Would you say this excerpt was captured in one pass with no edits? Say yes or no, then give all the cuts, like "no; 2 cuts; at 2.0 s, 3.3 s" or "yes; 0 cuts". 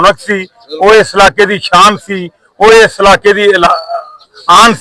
yes; 0 cuts